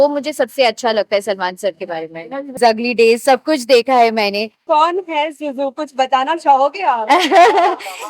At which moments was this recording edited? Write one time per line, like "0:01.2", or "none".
0:02.6
0:04.6